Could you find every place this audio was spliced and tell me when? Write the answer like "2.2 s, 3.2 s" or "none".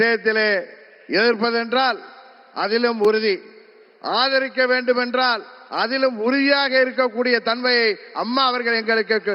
none